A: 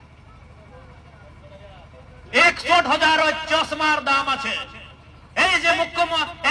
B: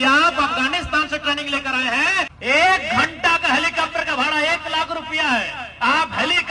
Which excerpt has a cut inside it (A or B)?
B